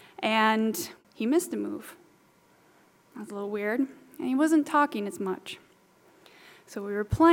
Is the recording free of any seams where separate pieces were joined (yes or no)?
no